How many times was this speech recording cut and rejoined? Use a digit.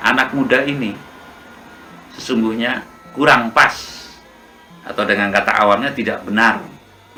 0